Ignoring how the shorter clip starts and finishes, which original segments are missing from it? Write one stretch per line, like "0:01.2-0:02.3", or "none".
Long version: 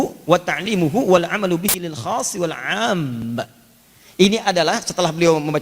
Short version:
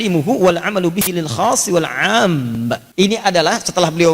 0:03.5-0:04.1